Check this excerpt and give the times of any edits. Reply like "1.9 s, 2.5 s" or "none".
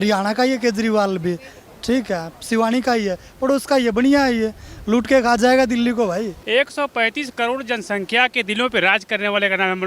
6.4 s